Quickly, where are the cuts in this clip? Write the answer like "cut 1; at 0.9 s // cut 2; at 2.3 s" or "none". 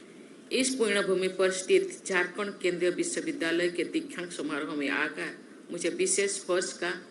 none